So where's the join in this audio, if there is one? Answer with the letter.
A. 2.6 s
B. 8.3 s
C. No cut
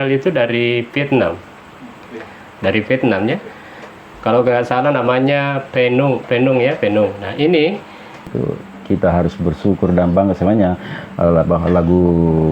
B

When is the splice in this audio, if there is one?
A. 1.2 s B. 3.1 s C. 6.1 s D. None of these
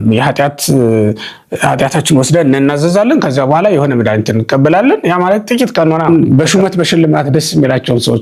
C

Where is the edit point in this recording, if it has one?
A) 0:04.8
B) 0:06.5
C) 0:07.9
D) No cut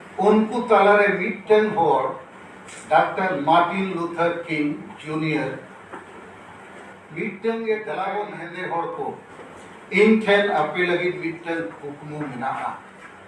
C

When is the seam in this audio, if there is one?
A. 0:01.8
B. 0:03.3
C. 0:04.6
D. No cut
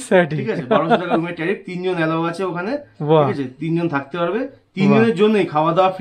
D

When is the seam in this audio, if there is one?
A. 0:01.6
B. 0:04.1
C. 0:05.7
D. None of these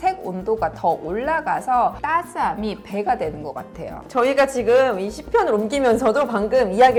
D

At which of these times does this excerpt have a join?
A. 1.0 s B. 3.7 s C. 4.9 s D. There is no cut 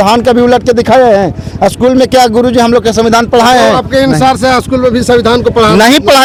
D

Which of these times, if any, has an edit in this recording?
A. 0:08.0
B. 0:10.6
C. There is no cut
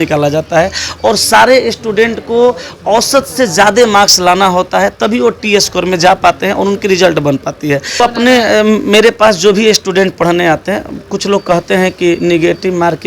A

